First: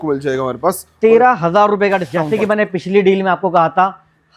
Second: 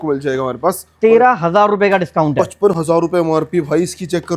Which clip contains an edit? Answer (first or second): first